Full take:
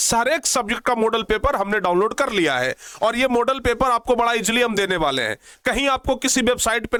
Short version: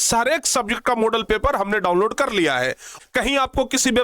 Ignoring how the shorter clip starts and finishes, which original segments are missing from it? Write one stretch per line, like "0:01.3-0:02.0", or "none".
0:02.8-0:05.4